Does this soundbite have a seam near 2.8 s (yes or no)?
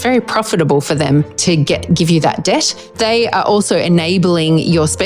yes